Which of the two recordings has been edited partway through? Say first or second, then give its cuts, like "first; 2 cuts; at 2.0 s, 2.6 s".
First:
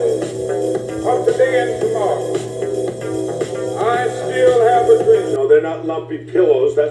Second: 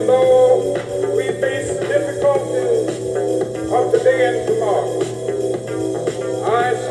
first; 1 cut; at 5.3 s